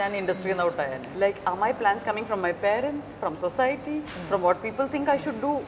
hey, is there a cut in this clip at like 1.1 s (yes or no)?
yes